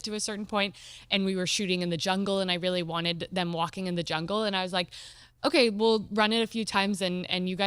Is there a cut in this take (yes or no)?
no